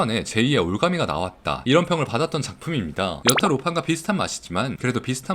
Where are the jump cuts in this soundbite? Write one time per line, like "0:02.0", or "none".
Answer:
0:03.2

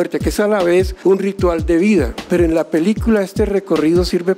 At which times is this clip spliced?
0:00.9
0:02.2

